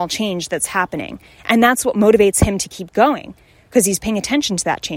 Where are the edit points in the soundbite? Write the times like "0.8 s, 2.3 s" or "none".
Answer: none